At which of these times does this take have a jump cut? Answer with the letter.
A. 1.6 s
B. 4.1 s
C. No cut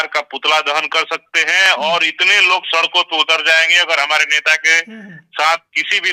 C